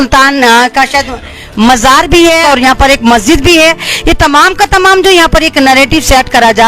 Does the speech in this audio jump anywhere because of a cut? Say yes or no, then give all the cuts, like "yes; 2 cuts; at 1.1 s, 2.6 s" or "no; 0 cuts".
yes; 1 cut; at 2.4 s